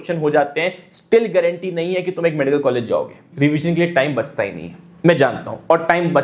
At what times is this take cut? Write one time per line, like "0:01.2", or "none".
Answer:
0:03.3